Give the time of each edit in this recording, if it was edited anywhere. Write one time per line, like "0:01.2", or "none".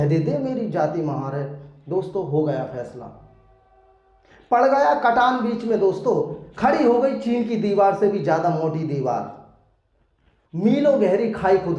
none